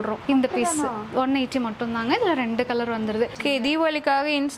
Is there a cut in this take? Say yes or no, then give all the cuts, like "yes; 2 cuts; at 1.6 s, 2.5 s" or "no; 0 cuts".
yes; 1 cut; at 3.3 s